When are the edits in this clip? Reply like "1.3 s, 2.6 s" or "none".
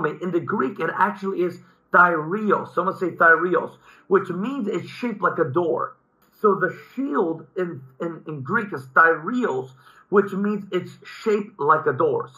6.2 s

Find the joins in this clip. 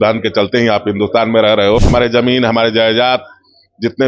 1.9 s

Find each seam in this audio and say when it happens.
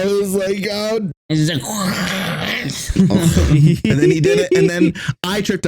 1.1 s

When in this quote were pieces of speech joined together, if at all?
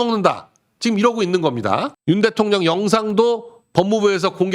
1.9 s

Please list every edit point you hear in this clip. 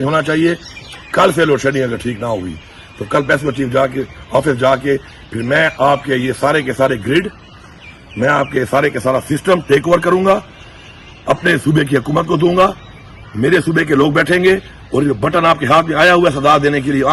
none

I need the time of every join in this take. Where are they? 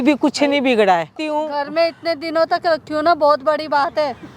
1.2 s

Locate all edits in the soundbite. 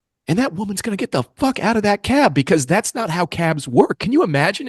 none

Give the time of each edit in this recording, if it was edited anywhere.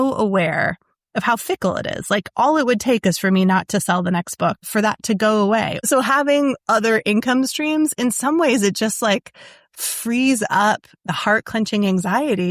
4.6 s, 5.8 s, 11.1 s

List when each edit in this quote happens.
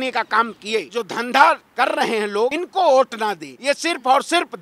1.0 s, 2.6 s, 3.5 s

